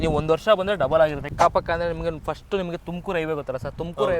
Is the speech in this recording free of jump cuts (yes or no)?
no